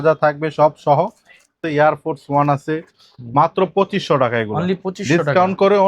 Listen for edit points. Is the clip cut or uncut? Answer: cut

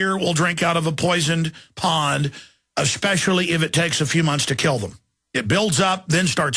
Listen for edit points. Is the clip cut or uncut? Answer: cut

